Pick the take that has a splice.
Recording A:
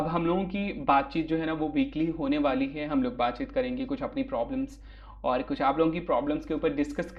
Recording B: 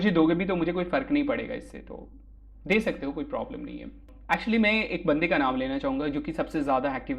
B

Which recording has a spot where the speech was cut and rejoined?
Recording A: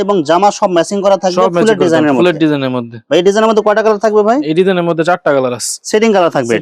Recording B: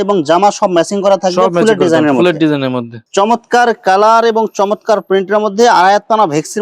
B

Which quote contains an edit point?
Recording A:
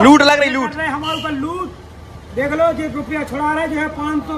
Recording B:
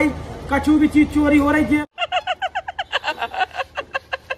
B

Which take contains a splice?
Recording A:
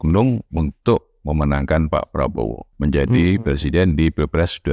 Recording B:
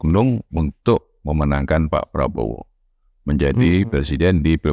A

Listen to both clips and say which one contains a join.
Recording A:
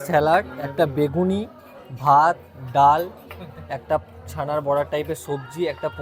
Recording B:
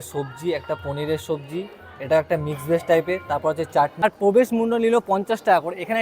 B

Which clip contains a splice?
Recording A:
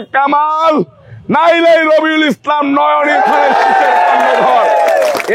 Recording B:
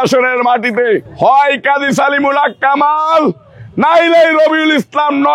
B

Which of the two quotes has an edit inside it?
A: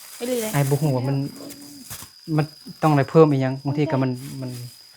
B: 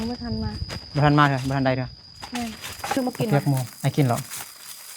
B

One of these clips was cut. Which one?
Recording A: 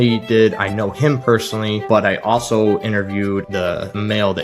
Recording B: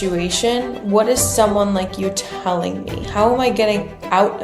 A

